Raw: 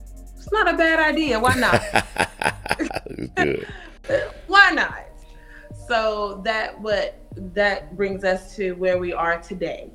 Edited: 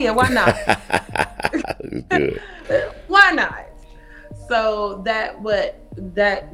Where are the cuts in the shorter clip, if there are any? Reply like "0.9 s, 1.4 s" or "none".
2.5 s